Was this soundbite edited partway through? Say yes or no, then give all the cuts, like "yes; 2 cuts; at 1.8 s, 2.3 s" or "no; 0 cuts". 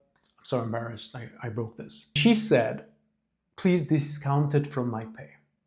yes; 1 cut; at 2.2 s